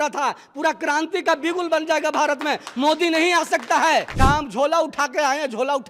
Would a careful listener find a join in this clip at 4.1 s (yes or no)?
yes